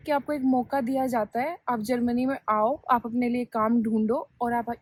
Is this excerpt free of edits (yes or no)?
yes